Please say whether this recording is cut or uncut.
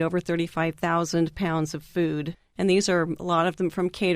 cut